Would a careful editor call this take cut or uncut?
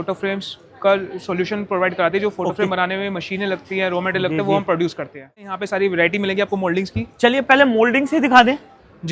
cut